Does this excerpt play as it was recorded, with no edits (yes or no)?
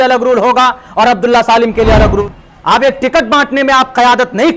no